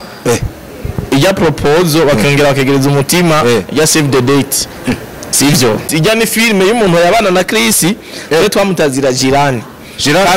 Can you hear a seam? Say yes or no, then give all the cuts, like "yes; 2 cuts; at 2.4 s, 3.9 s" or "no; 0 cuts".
yes; 1 cut; at 5.8 s